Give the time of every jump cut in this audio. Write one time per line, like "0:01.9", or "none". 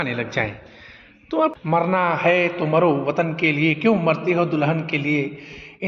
0:01.6